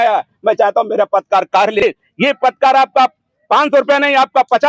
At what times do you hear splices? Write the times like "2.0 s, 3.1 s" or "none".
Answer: 1.8 s